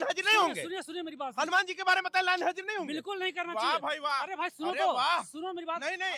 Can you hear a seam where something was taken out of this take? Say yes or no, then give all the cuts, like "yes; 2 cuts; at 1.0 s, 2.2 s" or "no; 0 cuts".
no; 0 cuts